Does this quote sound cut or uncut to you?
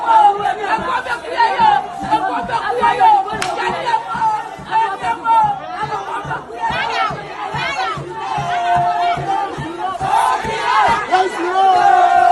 uncut